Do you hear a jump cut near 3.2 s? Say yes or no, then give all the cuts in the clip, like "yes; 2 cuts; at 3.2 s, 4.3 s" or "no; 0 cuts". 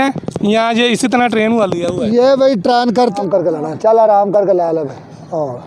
yes; 1 cut; at 3.2 s